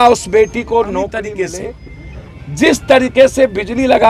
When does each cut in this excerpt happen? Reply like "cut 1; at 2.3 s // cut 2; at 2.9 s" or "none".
cut 1; at 1.4 s